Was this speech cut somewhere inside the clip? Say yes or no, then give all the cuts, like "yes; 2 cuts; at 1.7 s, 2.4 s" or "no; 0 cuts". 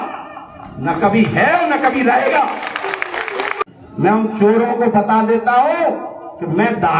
yes; 1 cut; at 3.6 s